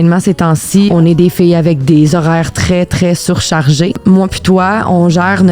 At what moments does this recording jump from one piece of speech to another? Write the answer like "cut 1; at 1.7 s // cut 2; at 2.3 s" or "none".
cut 1; at 0.9 s // cut 2; at 4.0 s